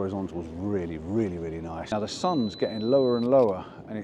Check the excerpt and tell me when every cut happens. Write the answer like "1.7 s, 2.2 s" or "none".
1.8 s